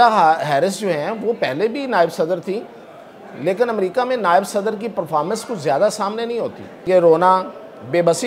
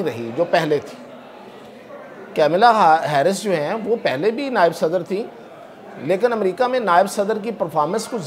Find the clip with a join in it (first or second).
first